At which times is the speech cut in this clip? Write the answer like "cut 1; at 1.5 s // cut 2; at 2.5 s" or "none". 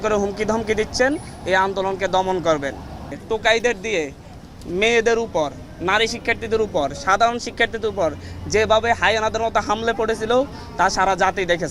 cut 1; at 3.2 s